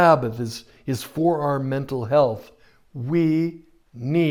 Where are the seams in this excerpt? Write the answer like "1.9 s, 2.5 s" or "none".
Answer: none